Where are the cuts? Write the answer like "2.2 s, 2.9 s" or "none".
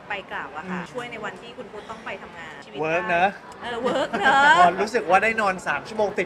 0.9 s, 2.6 s